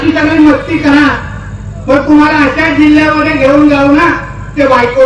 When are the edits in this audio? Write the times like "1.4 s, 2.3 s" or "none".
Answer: none